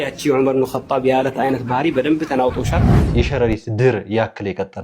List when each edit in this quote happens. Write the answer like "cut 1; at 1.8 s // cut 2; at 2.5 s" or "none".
cut 1; at 3.1 s